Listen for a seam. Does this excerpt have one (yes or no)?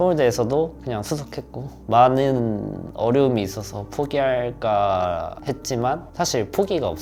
no